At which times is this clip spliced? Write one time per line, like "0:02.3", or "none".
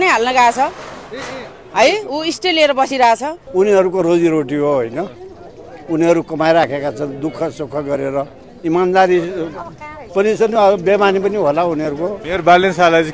0:03.4
0:12.2